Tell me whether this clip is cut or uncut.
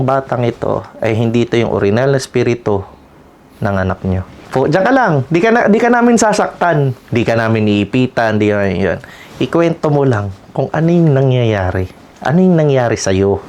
cut